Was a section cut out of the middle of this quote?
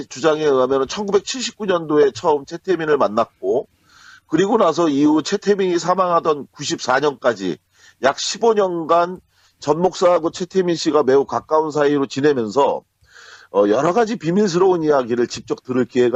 no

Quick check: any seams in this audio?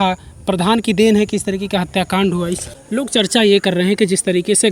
yes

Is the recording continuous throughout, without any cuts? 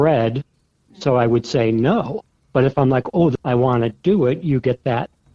no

